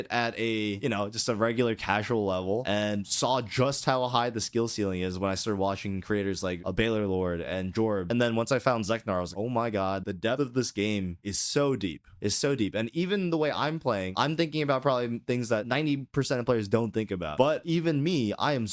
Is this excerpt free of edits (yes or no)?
no